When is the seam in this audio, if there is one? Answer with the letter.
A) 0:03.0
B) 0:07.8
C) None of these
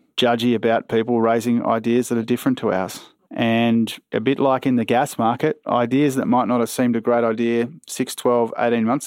A